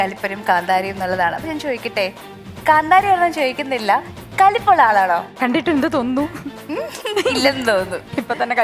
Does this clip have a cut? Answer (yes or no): yes